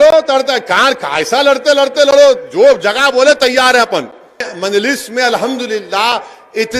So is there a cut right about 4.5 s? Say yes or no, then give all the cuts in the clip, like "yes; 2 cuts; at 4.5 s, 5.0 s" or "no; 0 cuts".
yes; 1 cut; at 4.5 s